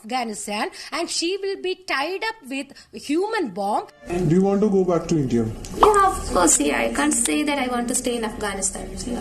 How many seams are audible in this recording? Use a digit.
2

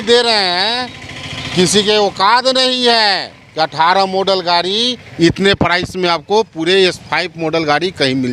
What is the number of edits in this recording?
0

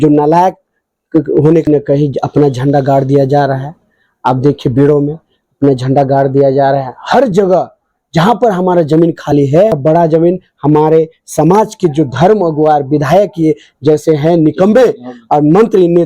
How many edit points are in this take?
2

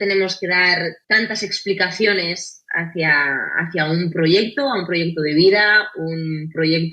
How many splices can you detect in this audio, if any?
1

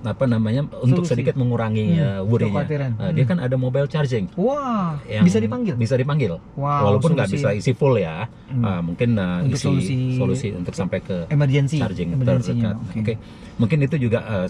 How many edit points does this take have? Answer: 0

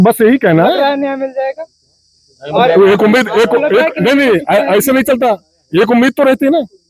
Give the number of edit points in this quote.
0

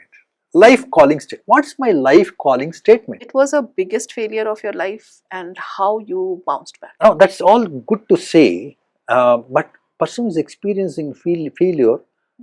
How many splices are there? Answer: 2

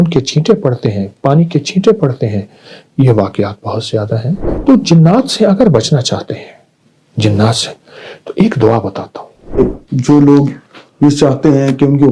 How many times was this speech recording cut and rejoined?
2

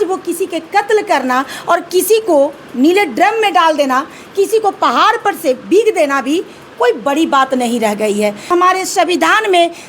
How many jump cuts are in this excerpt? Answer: 1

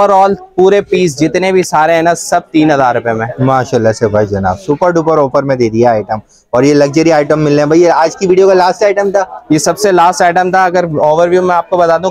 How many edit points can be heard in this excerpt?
0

